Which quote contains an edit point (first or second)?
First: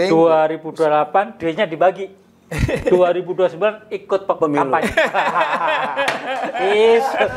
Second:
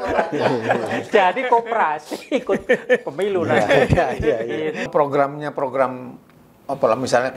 second